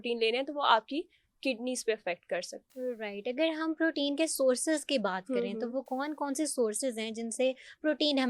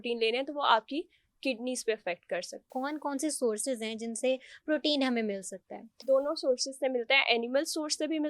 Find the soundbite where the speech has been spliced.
second; 2 cuts; at 2.7 s, 6.0 s

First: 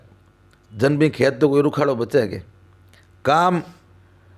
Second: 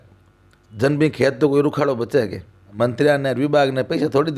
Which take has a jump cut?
second; 1 cut; at 2.7 s

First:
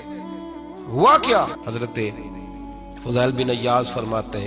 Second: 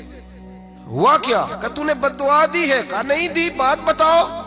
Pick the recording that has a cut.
first; 1 cut; at 1.6 s

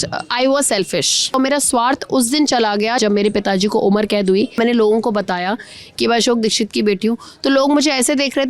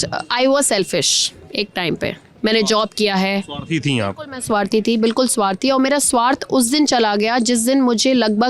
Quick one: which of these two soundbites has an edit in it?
first; 3 cuts; at 1.3 s, 3.0 s, 4.6 s

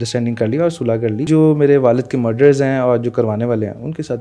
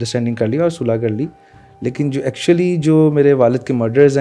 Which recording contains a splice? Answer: first; 1 cut; at 1.2 s

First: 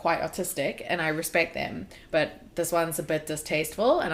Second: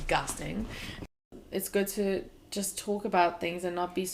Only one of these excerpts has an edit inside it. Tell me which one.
second; 2 cuts; at 1.1 s, 2.4 s

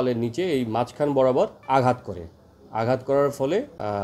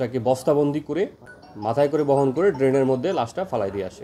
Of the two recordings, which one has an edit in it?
first; 1 cut; at 1.6 s

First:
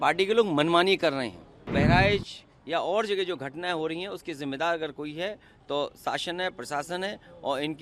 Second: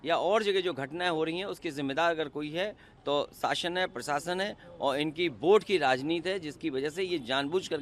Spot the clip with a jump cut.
first; 1 cut; at 1.7 s

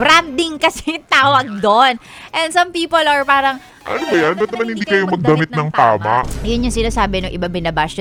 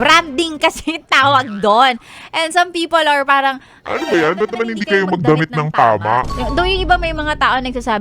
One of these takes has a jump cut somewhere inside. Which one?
second; 1 cut; at 6.3 s

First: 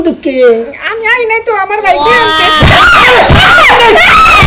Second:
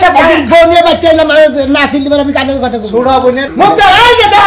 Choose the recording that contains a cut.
second; 1 cut; at 3.5 s

